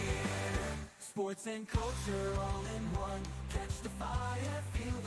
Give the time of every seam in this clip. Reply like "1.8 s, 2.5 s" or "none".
none